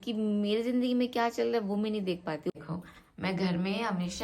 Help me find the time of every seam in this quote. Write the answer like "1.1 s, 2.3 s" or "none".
2.5 s